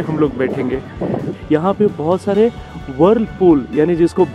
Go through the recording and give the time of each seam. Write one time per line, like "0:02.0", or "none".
0:01.3